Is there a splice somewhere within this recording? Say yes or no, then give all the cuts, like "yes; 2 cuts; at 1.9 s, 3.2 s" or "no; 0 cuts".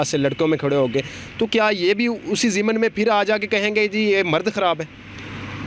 no; 0 cuts